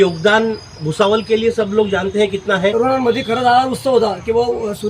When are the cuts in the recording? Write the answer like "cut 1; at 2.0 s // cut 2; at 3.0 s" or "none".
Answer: cut 1; at 2.7 s